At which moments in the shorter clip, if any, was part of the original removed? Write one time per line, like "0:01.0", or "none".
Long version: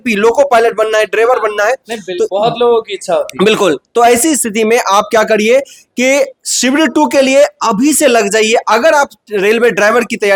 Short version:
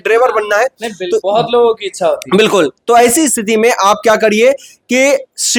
none